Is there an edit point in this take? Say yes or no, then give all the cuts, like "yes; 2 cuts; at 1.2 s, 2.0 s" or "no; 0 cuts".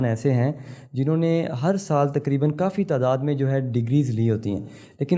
no; 0 cuts